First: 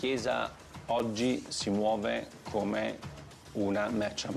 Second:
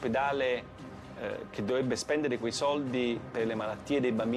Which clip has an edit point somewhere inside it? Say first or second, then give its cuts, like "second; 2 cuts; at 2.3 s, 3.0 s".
first; 1 cut; at 1.0 s